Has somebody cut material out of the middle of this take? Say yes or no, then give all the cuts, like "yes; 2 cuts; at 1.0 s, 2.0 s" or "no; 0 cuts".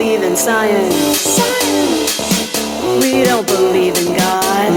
no; 0 cuts